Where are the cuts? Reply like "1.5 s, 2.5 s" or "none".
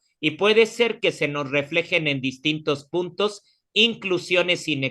none

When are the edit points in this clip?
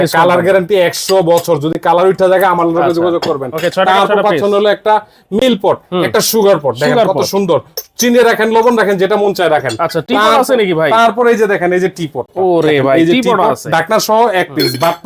none

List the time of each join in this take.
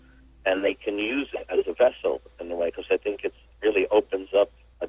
none

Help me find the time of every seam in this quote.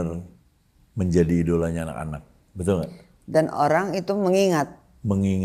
none

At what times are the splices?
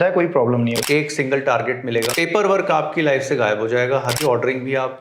0.8 s, 2.1 s, 4.2 s

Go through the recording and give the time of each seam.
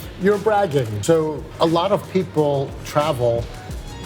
1.0 s

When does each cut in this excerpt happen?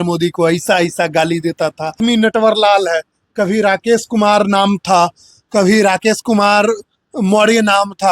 2.0 s

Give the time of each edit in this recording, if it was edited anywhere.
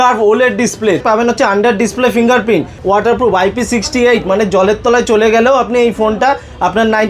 1.0 s, 2.7 s

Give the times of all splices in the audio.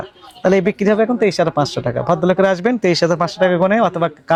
none

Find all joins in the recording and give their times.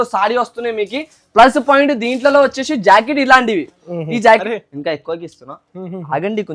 4.4 s

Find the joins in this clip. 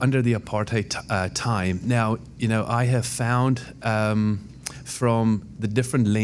none

